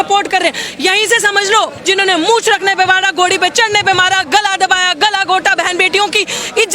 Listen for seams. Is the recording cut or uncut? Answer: cut